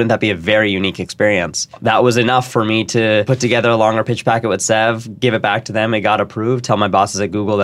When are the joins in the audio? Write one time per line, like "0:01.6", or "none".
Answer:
0:01.7
0:03.3